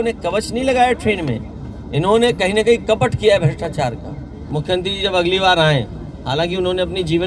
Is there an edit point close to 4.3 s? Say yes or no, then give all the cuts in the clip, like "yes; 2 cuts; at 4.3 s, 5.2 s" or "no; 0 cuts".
yes; 1 cut; at 4.3 s